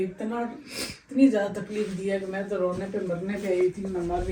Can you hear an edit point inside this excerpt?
no; 0 cuts

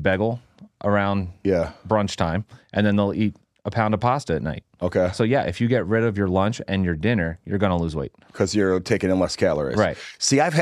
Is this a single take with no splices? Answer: yes; 0 cuts

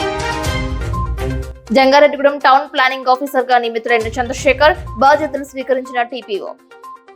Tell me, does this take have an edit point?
yes; 1 cut; at 1.5 s

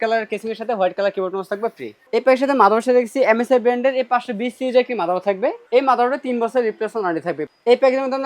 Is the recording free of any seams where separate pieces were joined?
no; 3 cuts; at 1.9 s, 5.6 s, 7.4 s

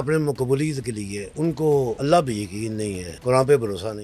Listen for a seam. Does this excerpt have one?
yes; 3 cuts; at 1.2 s, 2.0 s, 3.1 s

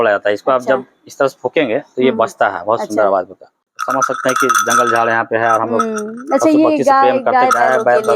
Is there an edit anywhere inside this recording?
yes; 1 cut; at 3.7 s

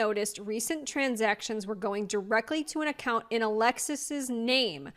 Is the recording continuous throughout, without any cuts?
yes; 0 cuts

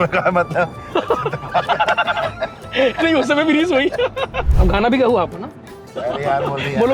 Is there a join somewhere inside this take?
yes; 1 cut; at 4.5 s

